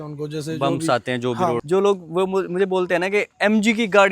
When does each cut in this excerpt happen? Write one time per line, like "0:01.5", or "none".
0:01.6